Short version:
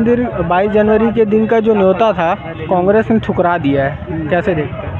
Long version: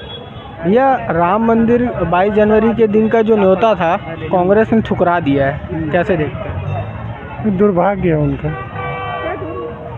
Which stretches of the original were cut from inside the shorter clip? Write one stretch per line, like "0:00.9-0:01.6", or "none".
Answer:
none